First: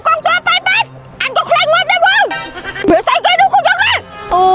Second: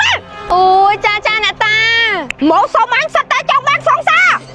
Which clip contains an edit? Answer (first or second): first